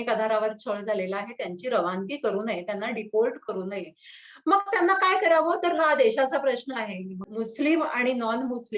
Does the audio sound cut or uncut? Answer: cut